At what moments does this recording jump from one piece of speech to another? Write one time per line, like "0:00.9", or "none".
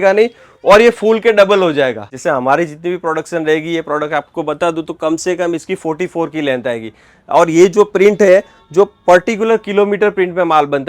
0:02.1